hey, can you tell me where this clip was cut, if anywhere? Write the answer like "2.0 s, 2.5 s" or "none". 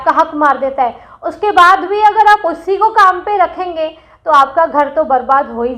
none